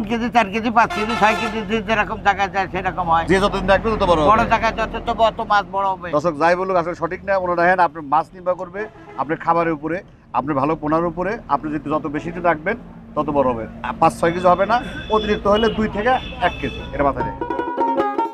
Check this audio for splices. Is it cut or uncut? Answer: uncut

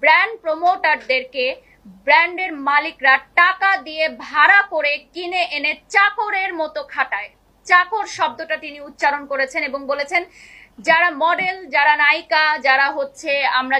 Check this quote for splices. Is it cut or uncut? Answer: uncut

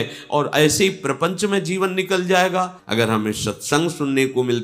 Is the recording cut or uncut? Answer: cut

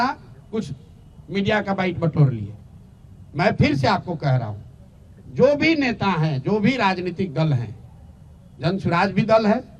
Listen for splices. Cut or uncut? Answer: uncut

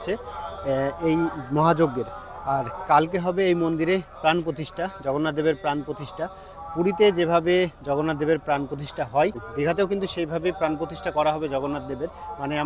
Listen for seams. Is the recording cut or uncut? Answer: uncut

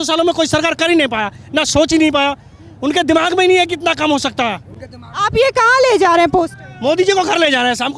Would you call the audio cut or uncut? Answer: uncut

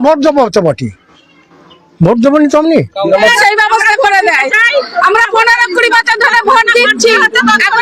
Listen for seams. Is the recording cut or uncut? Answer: cut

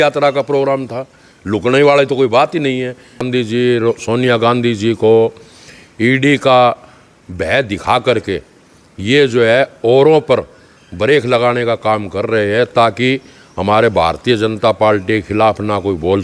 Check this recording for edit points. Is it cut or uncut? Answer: cut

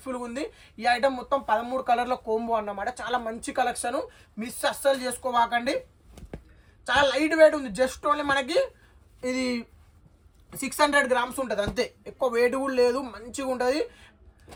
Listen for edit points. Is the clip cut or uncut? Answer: uncut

